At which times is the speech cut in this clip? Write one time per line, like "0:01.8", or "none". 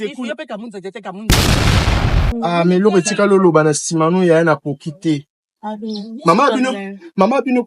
0:01.2
0:02.2